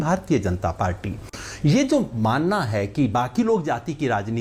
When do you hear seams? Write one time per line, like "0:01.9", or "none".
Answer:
none